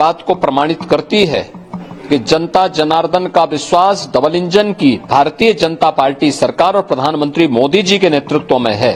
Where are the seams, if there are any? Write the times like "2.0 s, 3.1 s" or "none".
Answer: none

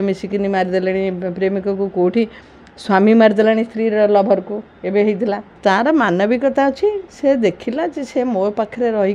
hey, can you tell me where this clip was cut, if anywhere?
5.5 s

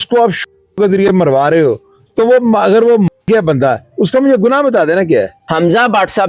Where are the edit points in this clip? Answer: none

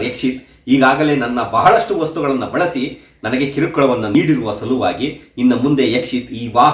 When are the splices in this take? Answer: 4.1 s

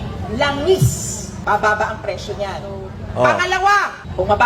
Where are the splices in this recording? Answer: none

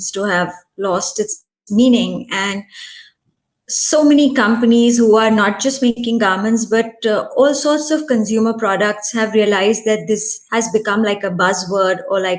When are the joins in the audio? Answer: none

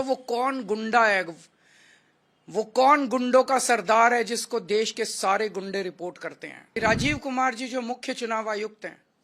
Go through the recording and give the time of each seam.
6.5 s

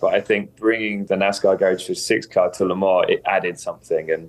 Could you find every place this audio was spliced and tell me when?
1.0 s

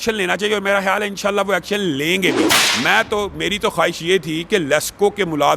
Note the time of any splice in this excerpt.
2.6 s

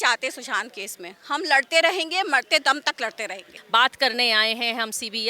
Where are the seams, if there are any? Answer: 3.5 s

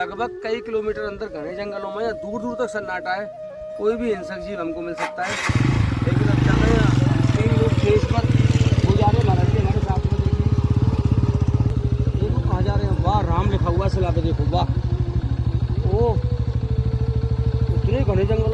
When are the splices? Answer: 11.7 s

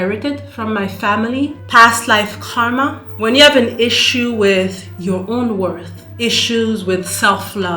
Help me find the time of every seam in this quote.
3.1 s

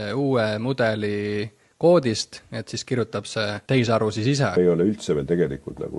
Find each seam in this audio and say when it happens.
3.6 s, 4.6 s

